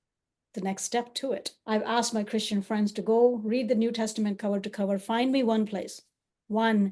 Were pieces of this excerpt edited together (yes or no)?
yes